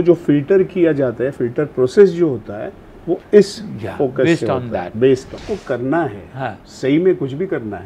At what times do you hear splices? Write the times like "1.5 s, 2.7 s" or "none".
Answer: 5.4 s